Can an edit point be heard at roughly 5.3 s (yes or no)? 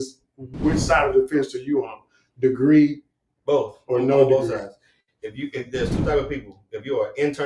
no